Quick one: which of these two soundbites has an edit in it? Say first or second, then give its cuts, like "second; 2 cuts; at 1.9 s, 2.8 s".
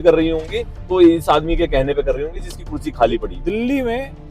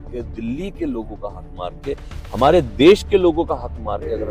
first; 1 cut; at 3.3 s